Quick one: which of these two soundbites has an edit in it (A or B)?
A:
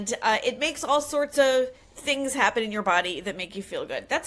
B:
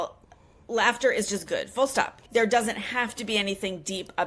B